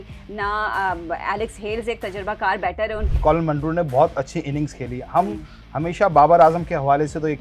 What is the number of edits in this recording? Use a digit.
1